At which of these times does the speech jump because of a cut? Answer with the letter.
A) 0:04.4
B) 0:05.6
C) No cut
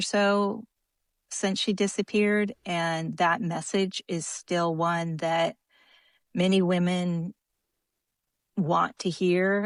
C